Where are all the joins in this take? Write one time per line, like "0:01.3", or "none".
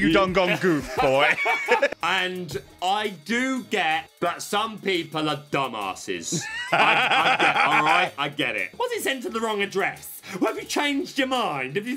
0:01.9
0:04.1
0:08.7